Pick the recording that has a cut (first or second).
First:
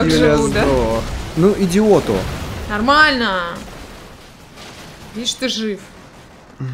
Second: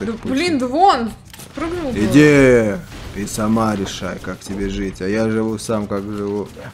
first